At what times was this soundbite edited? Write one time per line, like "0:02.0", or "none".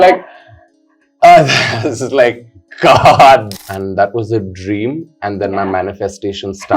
0:03.5